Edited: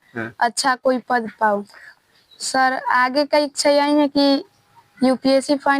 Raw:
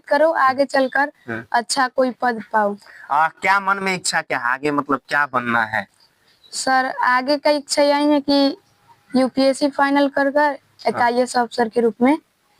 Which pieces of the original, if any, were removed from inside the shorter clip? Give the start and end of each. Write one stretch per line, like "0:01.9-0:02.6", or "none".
0:02.9-0:05.9

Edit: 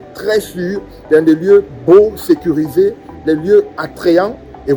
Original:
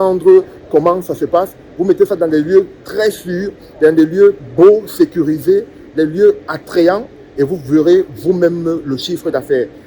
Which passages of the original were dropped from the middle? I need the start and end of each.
none

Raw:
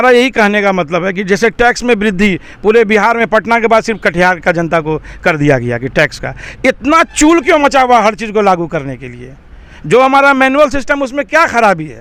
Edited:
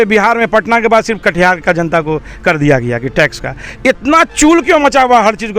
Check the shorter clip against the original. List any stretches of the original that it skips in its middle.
none

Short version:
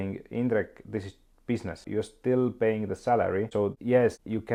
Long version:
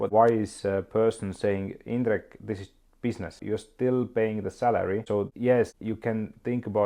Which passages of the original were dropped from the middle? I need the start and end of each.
none

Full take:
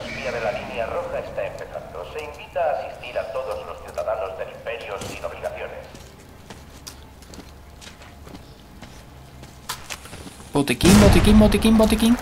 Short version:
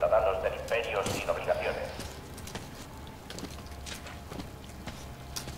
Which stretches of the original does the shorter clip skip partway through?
none

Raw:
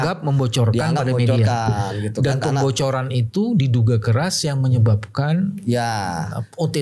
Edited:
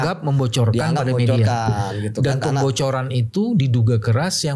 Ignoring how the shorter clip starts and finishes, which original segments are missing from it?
none

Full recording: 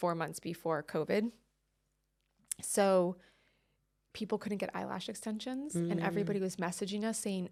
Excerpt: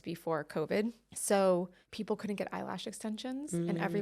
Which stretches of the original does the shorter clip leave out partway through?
0:01.5-0:02.6
0:03.3-0:04.0

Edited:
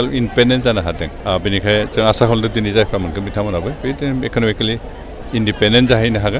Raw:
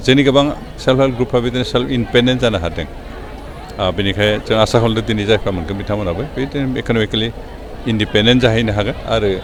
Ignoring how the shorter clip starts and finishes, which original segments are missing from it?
0:02.9-0:03.6

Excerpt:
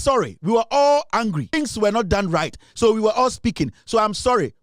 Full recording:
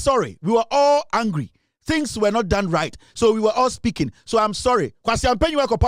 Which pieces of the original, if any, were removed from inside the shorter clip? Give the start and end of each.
0:01.5-0:01.9

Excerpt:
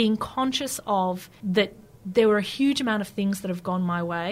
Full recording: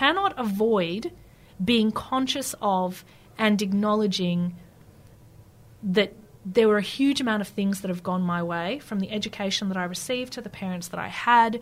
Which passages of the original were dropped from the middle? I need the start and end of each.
0:03.0-0:05.7

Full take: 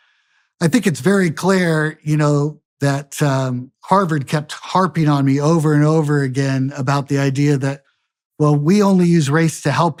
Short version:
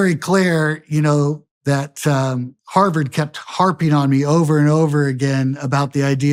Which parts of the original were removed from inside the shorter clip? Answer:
none

